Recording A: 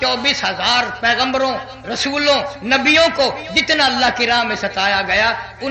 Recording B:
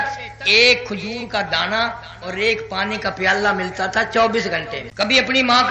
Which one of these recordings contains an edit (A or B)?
B